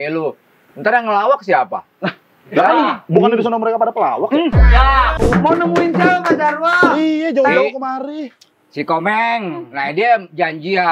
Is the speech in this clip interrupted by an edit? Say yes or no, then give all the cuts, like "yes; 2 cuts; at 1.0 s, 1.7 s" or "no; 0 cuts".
yes; 2 cuts; at 5.2 s, 9.7 s